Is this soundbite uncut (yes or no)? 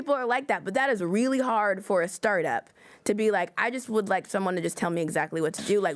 yes